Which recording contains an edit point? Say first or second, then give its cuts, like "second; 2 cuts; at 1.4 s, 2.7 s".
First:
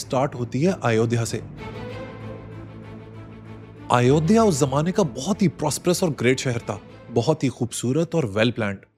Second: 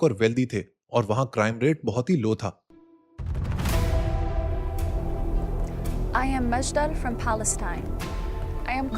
second; 1 cut; at 2.6 s